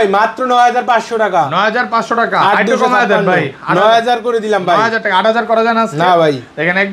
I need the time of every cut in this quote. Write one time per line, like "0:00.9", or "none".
none